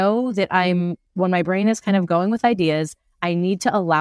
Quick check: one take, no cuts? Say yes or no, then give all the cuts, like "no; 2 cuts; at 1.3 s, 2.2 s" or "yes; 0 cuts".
yes; 0 cuts